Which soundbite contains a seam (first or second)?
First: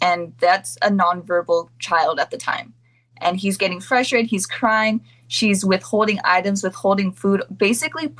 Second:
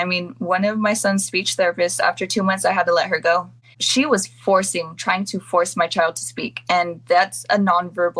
second